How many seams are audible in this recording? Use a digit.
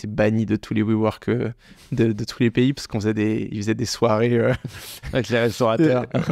0